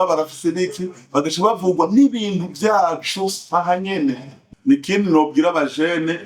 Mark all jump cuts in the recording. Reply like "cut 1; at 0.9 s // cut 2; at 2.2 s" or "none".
cut 1; at 4.4 s